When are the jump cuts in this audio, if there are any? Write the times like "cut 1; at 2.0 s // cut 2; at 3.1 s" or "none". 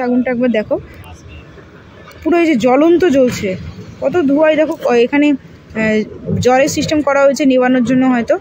none